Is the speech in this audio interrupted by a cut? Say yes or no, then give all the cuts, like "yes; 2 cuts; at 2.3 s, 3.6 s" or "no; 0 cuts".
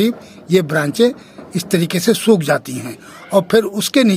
no; 0 cuts